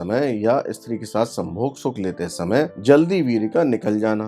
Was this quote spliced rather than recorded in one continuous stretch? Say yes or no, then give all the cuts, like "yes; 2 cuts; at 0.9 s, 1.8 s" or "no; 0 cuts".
no; 0 cuts